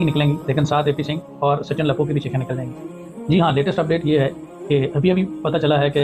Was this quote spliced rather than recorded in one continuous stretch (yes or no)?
no